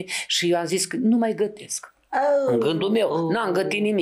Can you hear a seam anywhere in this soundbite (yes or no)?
no